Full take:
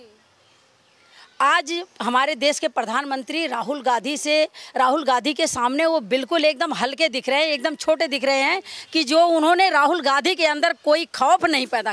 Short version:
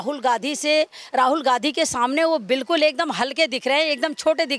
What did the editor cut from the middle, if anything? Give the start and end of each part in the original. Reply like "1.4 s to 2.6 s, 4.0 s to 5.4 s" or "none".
none